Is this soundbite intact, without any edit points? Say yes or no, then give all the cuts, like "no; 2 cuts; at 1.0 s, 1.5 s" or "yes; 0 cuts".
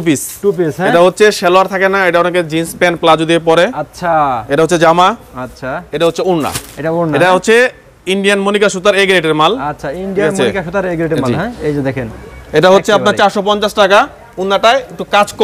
yes; 0 cuts